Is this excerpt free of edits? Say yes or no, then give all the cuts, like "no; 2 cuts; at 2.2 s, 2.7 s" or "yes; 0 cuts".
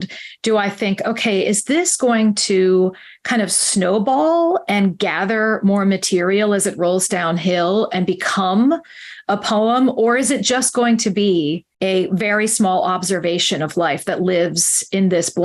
no; 1 cut; at 11.7 s